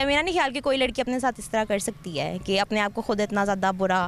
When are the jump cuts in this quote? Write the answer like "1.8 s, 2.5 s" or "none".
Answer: none